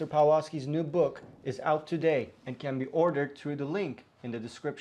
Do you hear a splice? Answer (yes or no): no